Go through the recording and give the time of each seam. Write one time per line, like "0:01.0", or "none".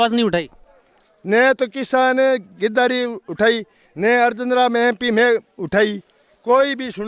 none